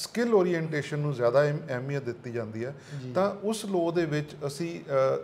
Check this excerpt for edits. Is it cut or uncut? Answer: uncut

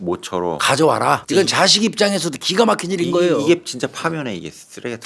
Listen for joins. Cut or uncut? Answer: cut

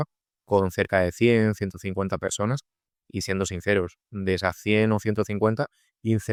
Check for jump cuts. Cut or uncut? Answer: uncut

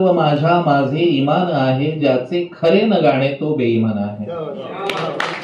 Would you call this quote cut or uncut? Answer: uncut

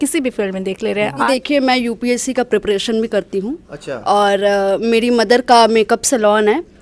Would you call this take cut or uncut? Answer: cut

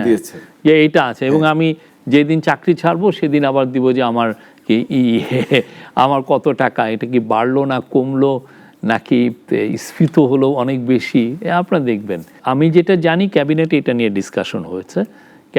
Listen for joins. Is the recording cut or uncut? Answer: uncut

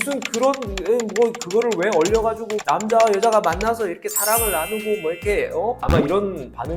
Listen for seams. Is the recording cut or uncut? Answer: uncut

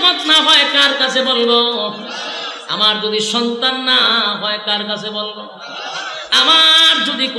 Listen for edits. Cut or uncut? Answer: uncut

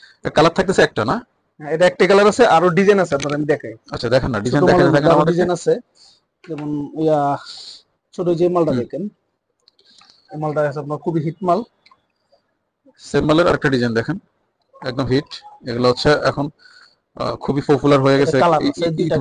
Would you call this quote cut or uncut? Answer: uncut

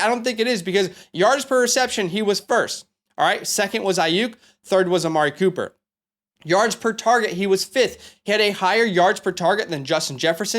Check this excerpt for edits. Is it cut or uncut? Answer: uncut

